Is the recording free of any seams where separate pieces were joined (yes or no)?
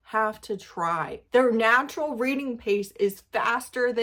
yes